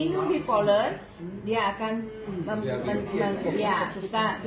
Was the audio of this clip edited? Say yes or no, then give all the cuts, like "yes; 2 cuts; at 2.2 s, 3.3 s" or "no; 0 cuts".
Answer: no; 0 cuts